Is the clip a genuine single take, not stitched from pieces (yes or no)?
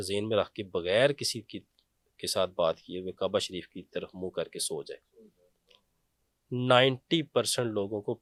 yes